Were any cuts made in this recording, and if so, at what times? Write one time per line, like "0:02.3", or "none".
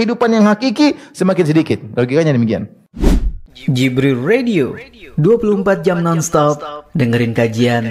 0:02.8